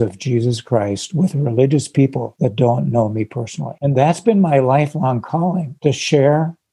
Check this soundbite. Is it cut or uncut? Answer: cut